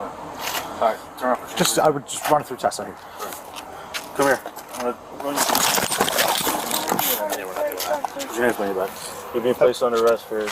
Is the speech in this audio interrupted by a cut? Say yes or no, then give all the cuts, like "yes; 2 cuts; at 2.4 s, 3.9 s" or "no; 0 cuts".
no; 0 cuts